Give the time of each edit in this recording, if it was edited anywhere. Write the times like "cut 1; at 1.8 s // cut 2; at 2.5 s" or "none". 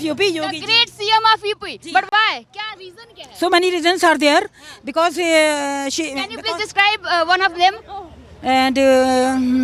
none